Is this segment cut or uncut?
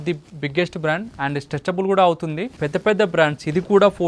cut